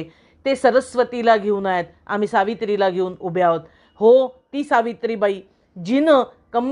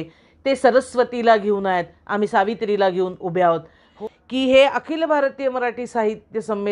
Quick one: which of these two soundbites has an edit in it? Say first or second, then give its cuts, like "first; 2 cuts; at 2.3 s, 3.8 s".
second; 1 cut; at 3.9 s